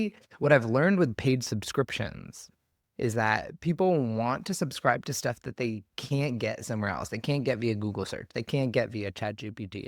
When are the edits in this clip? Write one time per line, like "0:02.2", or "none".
none